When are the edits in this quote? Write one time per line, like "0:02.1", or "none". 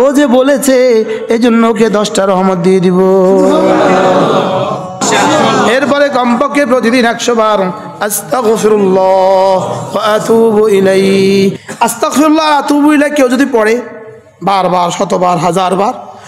0:05.0
0:11.6